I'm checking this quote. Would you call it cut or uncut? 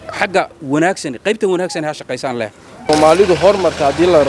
cut